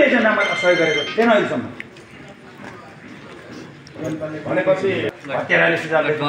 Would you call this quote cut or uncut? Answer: cut